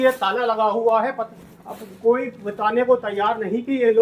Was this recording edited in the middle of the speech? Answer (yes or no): no